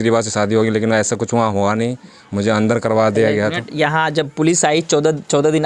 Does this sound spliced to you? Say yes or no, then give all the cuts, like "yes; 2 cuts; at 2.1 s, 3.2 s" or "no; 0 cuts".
no; 0 cuts